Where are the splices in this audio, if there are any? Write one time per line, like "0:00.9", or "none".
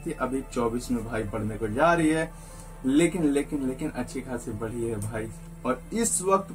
0:05.4